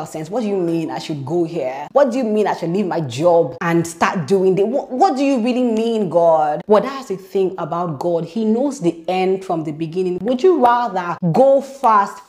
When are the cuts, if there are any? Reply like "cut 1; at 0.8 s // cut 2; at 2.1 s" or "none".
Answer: none